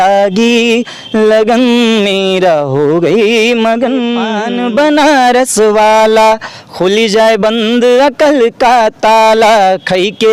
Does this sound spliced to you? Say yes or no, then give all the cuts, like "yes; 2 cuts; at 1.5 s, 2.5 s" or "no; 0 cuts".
yes; 1 cut; at 4.4 s